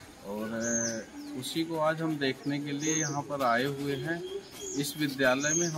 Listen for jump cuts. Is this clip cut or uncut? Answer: uncut